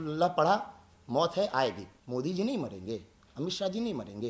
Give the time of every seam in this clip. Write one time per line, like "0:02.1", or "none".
0:01.9